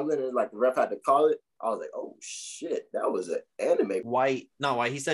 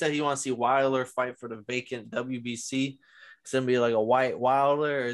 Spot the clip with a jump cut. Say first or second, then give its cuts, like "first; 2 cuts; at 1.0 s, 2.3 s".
first; 1 cut; at 4.1 s